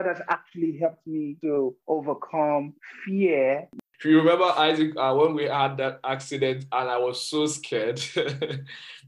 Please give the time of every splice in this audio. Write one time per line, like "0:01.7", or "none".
0:03.8